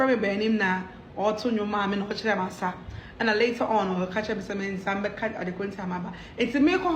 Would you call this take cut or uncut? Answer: uncut